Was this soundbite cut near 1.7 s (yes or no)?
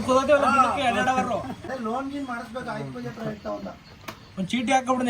yes